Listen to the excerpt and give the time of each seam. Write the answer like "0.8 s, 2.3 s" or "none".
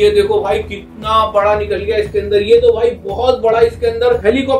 none